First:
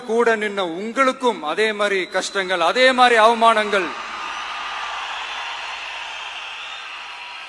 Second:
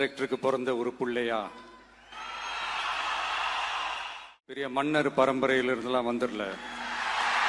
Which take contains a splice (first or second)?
second